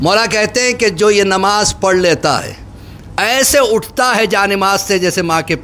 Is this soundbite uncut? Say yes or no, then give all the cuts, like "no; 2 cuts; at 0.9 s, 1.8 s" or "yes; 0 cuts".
yes; 0 cuts